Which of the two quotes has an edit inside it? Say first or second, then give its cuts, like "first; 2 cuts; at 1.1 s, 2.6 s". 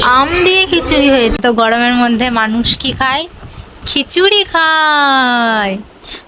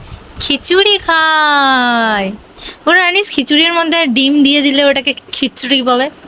first; 1 cut; at 1.3 s